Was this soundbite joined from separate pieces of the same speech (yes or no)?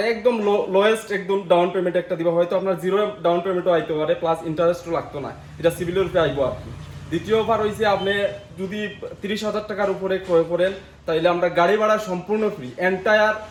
no